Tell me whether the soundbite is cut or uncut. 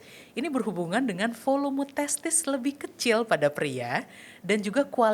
uncut